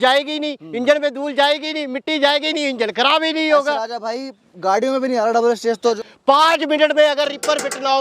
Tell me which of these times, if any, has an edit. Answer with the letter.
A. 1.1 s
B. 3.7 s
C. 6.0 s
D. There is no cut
C